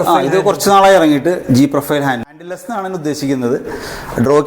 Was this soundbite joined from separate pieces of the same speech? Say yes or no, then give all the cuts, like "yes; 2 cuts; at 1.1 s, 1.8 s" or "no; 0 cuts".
yes; 1 cut; at 2.2 s